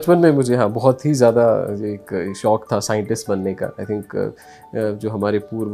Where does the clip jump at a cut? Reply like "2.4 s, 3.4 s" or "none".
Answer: none

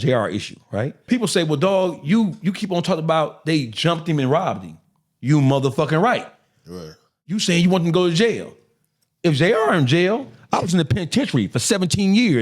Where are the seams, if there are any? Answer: 1.1 s, 7.3 s, 10.4 s

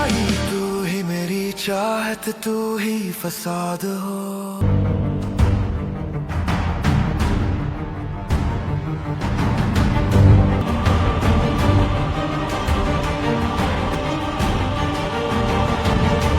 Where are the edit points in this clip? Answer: 4.5 s

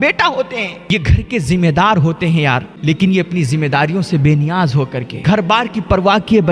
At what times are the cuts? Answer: 0.8 s, 2.7 s, 5.1 s

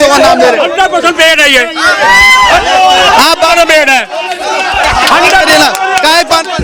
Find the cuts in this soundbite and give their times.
none

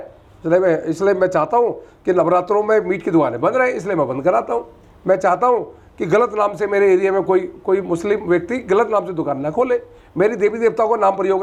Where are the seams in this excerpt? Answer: none

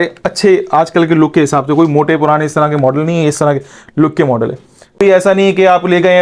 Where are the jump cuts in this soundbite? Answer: 5.0 s

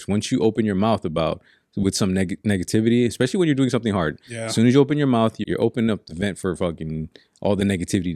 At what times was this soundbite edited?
5.4 s

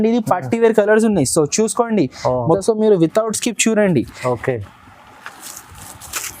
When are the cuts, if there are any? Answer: 2.6 s

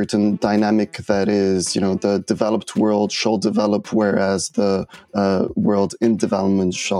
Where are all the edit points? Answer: none

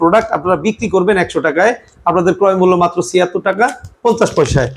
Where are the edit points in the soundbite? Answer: none

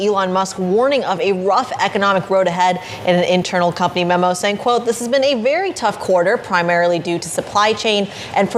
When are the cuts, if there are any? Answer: none

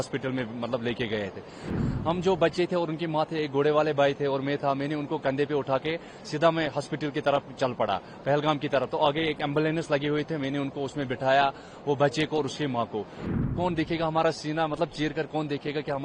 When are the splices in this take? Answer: 1.7 s, 13.3 s

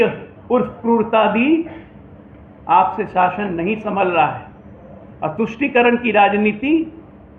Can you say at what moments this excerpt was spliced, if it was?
none

